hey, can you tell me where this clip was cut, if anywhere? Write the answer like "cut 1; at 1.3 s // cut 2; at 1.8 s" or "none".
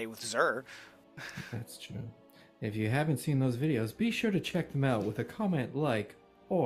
cut 1; at 5.0 s